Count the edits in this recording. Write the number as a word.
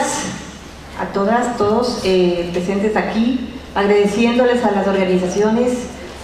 one